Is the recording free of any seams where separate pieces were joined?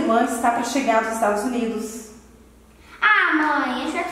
yes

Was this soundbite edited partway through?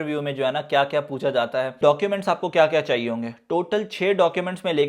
yes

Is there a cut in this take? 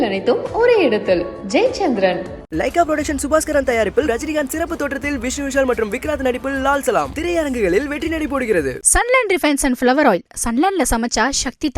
no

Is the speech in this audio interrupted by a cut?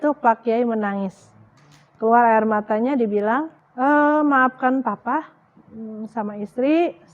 yes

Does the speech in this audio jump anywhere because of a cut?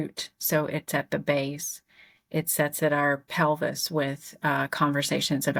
no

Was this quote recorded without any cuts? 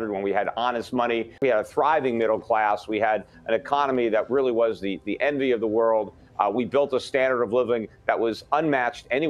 no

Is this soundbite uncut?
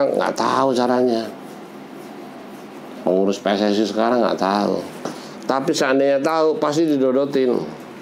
yes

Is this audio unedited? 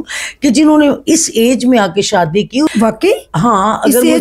no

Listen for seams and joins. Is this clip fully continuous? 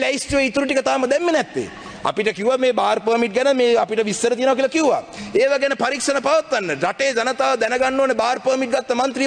yes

